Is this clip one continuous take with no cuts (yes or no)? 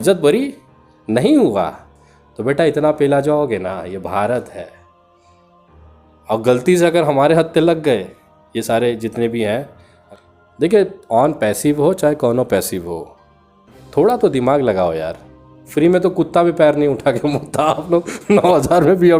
no